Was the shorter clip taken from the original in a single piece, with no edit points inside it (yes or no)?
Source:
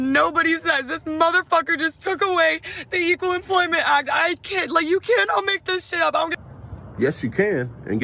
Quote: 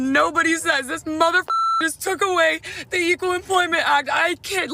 yes